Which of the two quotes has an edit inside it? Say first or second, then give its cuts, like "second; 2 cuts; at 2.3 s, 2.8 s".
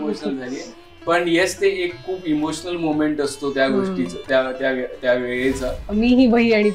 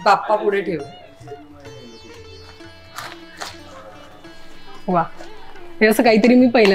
first; 1 cut; at 5.8 s